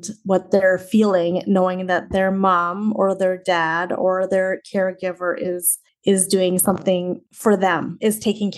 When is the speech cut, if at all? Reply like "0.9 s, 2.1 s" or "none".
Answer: none

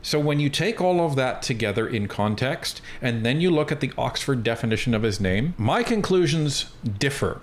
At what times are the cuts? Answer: 5.6 s

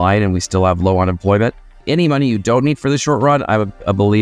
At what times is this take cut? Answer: 1.8 s

